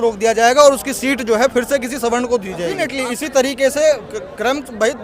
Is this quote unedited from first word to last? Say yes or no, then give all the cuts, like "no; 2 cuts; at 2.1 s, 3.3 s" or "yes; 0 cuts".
no; 1 cut; at 3.0 s